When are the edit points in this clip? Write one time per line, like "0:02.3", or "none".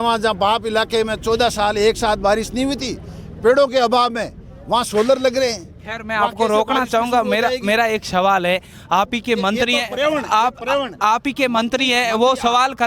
none